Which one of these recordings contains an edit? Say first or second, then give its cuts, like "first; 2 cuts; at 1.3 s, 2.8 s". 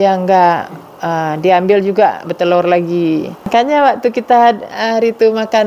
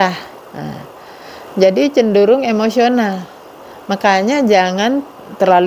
first; 1 cut; at 3.4 s